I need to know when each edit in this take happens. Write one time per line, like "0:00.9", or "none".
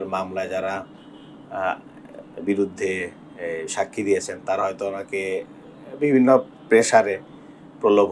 none